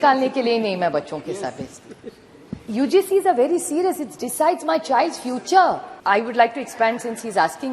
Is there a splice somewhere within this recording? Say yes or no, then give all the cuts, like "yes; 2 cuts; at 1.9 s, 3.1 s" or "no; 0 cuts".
yes; 1 cut; at 5.9 s